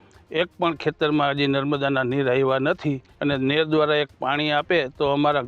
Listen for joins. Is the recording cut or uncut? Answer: cut